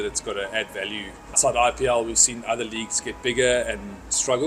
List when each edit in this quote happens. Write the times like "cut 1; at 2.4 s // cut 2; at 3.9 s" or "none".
cut 1; at 1.4 s